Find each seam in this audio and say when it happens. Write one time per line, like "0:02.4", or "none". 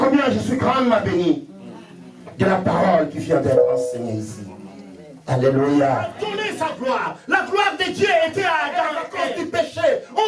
0:06.3
0:09.0